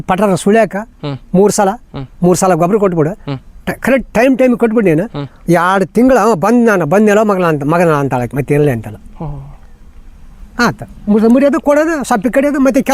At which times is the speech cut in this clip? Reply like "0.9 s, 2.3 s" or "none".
none